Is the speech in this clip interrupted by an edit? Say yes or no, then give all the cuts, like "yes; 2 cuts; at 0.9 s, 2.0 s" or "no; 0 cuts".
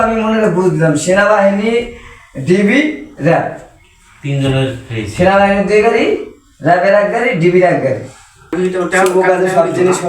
yes; 1 cut; at 8.5 s